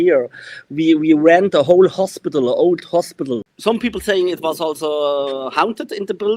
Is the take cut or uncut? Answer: cut